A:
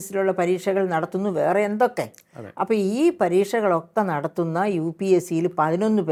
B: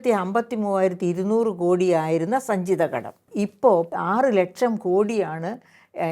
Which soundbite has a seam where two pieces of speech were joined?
B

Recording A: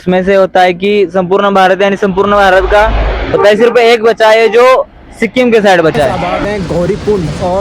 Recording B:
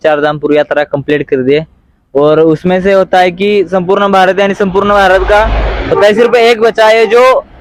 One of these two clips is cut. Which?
A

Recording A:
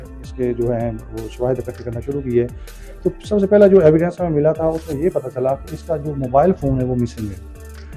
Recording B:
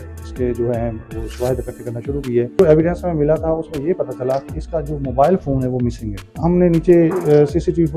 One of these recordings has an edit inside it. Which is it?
B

